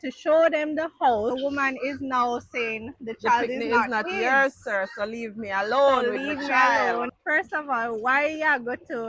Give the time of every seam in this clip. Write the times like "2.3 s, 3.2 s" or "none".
1.3 s, 7.2 s